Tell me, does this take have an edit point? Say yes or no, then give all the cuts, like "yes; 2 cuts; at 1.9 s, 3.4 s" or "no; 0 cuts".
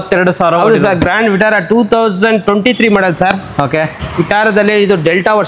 no; 0 cuts